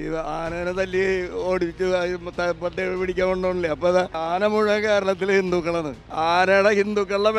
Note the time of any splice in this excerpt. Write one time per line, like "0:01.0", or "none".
0:04.2
0:06.0

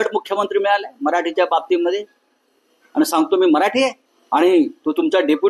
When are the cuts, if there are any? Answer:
0:04.1

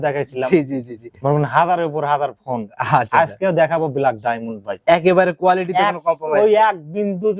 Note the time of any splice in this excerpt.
none

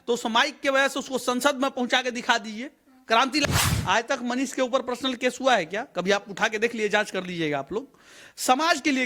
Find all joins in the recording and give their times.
0:03.5

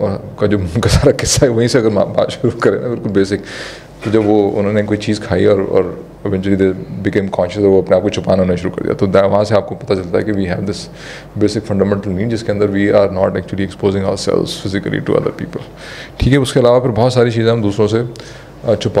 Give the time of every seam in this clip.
none

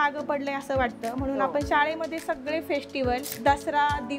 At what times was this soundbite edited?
0:03.3

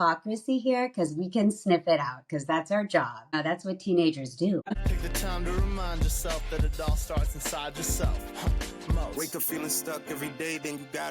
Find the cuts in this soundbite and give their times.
0:03.3
0:04.7

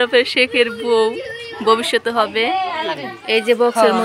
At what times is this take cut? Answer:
0:03.1

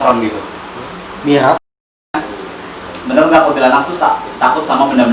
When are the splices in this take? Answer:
0:02.1

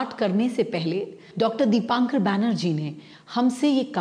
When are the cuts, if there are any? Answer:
0:01.2

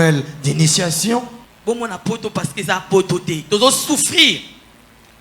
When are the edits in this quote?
0:01.4

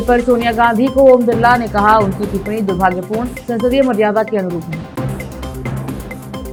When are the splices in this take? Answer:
none

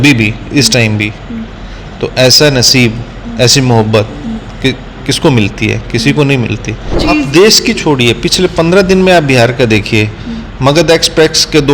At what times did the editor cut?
0:06.9

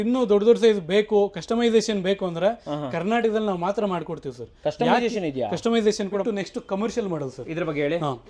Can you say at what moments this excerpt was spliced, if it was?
0:06.2

